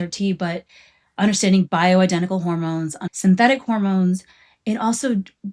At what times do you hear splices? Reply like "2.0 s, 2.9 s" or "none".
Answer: 3.0 s